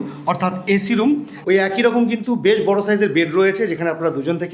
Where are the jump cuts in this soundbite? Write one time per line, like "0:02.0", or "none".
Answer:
0:01.3